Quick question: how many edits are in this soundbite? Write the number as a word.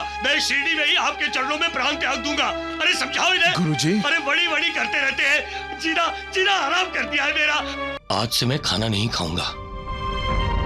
one